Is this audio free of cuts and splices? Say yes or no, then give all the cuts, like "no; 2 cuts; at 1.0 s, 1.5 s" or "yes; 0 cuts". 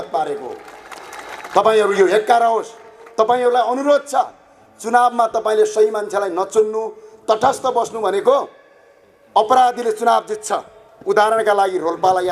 yes; 0 cuts